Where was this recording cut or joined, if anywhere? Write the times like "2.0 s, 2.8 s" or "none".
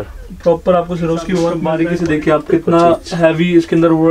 1.6 s

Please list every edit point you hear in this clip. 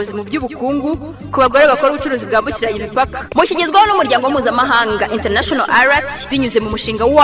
none

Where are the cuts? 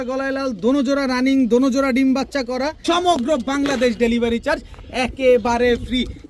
2.8 s

